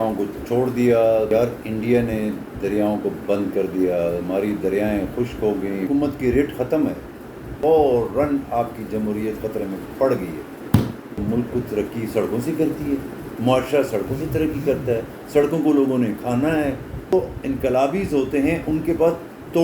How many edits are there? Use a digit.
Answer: 5